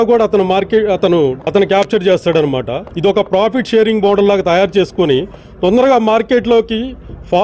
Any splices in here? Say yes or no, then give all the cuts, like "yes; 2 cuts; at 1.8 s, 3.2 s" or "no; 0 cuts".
yes; 2 cuts; at 1.4 s, 2.8 s